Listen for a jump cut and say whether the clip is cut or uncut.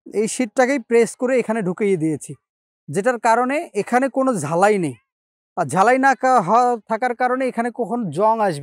uncut